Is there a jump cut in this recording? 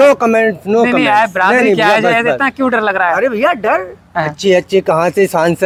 no; 0 cuts

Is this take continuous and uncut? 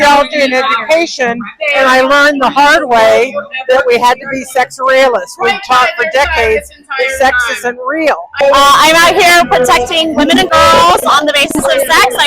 no; 1 cut; at 8.3 s

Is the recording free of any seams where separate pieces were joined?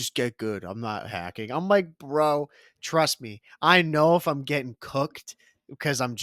yes; 0 cuts

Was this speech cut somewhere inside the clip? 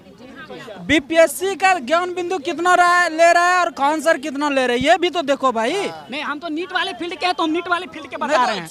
no; 0 cuts

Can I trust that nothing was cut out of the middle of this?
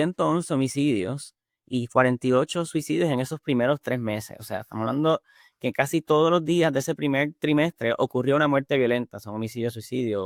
yes; 0 cuts

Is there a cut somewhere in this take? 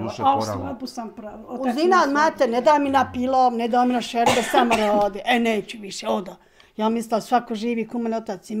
no; 0 cuts

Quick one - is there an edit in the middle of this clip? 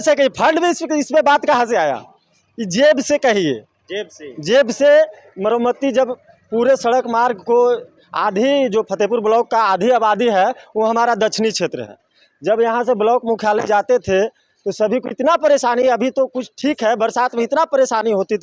no; 0 cuts

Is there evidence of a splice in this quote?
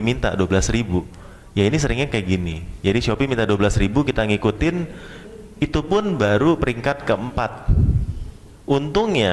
no; 0 cuts

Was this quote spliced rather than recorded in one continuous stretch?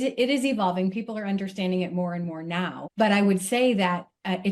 yes; 1 cut; at 2.8 s

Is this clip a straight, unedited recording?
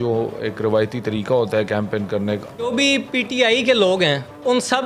no; 1 cut; at 2.7 s

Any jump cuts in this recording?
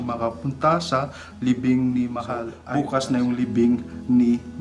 yes; 1 cut; at 2.6 s

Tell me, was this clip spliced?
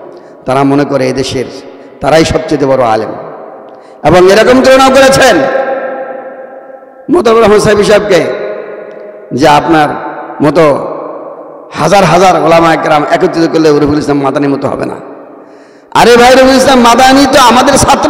no; 0 cuts

